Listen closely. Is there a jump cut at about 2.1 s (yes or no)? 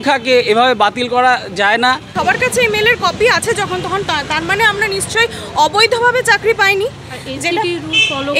yes